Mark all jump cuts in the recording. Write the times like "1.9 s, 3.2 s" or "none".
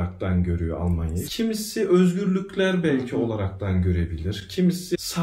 1.2 s